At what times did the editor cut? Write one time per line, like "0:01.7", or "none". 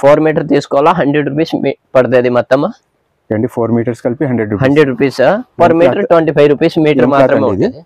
none

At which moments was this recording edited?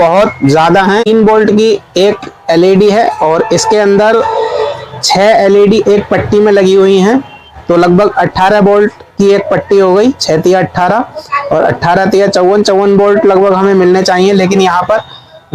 0:01.1

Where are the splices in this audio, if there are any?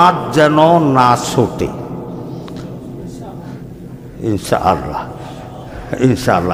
none

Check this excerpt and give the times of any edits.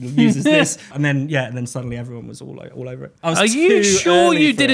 0:00.9
0:03.1

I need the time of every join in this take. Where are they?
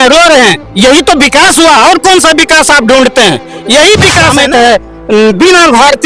0:04.3

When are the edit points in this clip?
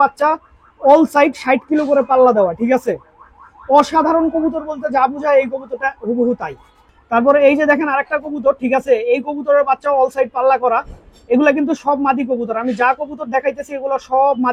none

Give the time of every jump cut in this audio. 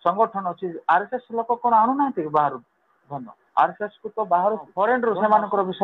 0:04.7

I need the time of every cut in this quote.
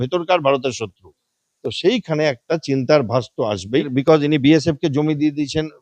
0:03.9

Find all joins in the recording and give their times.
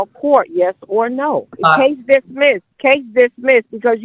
0:01.5
0:02.7

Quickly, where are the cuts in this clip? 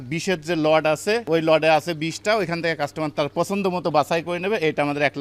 none

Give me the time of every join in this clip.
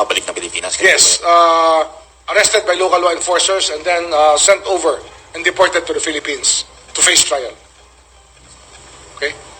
none

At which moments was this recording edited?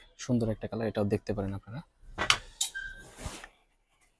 none

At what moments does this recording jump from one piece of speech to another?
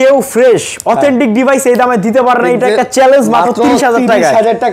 none

